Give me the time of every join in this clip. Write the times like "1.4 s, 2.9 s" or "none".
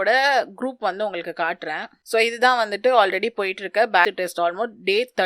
4.0 s